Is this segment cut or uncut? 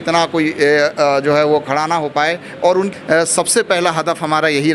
cut